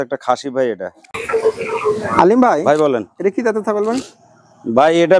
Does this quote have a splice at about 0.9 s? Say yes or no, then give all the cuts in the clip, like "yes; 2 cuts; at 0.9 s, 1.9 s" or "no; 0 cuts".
yes; 1 cut; at 0.9 s